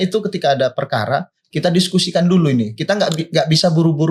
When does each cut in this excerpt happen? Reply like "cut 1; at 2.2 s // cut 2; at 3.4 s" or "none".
none